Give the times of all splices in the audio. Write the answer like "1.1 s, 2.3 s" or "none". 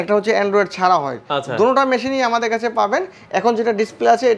none